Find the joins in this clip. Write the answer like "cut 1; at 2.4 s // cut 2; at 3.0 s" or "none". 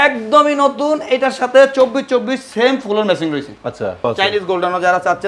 cut 1; at 4.1 s